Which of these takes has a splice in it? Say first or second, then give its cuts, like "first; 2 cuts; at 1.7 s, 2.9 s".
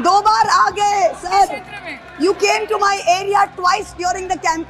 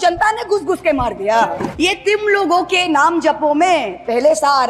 second; 1 cut; at 1.7 s